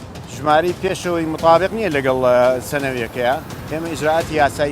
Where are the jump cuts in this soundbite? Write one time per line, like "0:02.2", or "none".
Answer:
0:03.5